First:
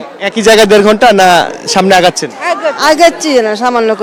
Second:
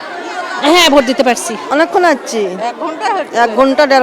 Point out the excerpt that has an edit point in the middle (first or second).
second